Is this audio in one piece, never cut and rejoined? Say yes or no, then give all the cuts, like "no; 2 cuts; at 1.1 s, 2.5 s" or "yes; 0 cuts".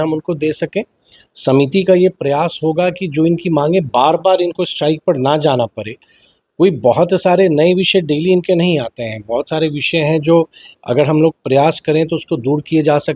yes; 0 cuts